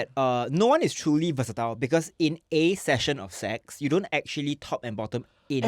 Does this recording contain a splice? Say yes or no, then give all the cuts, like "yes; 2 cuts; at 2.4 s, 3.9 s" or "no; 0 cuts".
no; 0 cuts